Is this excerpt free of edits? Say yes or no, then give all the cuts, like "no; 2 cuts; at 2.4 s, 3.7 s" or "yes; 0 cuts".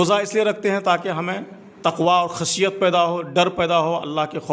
yes; 0 cuts